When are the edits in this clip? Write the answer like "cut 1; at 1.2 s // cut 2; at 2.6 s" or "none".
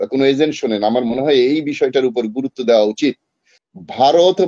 cut 1; at 3.5 s